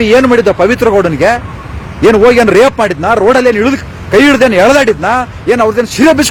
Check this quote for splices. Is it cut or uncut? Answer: uncut